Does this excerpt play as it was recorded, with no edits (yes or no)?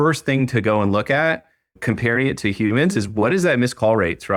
yes